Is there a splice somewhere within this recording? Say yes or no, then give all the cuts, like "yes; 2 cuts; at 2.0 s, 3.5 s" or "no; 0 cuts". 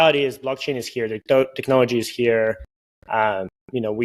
no; 0 cuts